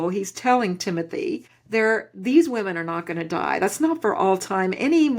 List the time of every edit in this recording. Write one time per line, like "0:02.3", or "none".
0:01.5